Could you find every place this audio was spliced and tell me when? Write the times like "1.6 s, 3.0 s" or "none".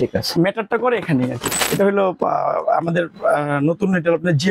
1.5 s